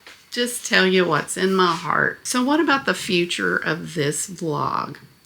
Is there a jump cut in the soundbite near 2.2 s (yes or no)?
yes